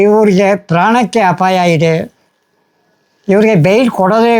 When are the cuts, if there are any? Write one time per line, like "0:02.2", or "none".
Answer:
none